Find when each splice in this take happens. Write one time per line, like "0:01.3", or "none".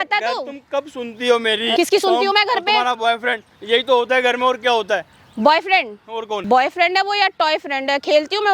0:01.7
0:06.4